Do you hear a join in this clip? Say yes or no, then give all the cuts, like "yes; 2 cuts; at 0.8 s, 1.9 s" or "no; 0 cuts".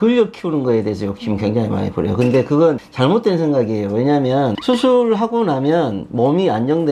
no; 0 cuts